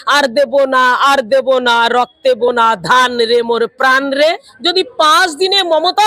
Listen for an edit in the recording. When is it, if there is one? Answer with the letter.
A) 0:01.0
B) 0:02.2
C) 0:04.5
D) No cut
C